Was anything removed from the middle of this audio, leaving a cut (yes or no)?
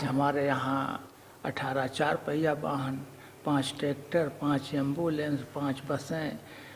yes